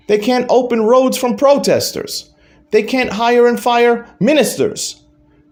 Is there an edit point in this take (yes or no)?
no